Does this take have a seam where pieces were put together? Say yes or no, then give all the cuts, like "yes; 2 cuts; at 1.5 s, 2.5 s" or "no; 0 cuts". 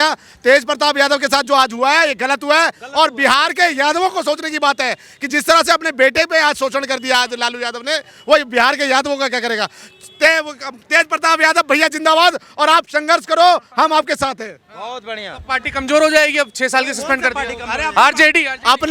no; 0 cuts